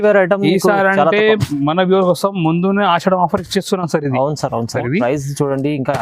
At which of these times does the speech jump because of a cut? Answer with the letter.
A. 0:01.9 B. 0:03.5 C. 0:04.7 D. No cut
C